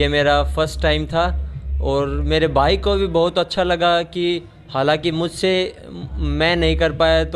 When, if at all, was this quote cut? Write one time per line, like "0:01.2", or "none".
none